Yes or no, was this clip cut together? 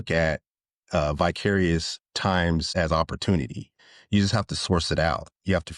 yes